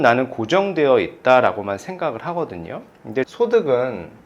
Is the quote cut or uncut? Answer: cut